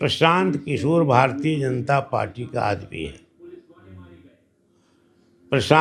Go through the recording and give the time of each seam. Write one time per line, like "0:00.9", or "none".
none